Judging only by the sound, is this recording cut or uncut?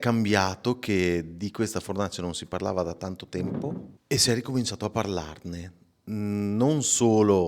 cut